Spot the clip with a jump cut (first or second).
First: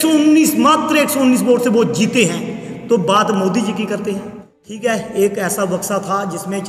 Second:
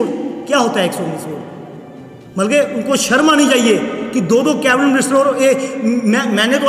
first